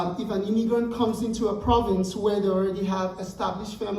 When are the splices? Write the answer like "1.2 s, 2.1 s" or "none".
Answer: none